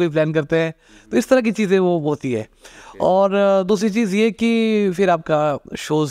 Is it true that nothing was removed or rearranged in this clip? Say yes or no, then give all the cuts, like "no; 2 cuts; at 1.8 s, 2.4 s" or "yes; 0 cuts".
yes; 0 cuts